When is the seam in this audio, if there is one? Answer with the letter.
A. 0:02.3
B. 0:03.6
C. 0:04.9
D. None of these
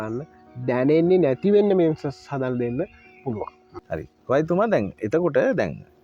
D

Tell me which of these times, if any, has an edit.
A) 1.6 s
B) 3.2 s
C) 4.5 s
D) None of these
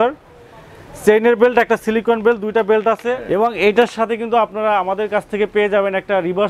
B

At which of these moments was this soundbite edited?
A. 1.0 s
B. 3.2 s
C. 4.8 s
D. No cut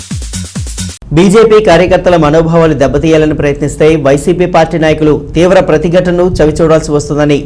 A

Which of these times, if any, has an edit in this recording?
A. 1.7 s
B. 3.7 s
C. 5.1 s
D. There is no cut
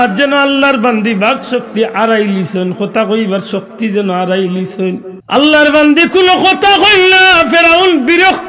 C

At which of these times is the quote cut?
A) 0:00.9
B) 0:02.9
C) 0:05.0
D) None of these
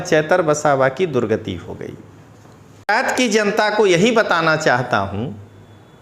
B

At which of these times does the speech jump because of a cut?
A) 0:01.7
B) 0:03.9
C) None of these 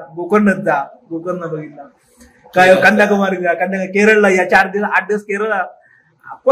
C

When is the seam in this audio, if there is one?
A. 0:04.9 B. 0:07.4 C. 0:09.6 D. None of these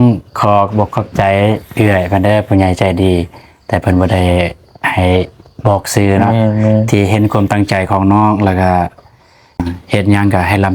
C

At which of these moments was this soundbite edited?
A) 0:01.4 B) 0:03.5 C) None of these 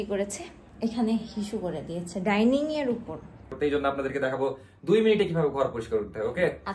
B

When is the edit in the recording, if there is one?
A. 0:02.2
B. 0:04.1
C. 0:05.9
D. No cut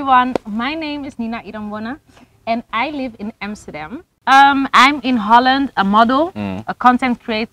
B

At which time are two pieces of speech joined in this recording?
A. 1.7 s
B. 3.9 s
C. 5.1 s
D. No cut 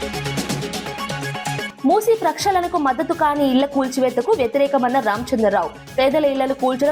A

